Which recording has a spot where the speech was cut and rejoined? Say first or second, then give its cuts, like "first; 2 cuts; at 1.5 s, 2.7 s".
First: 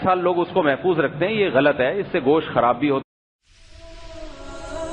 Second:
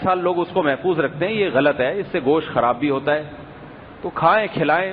second; 1 cut; at 3.0 s